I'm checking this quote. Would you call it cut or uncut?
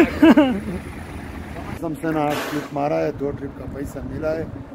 cut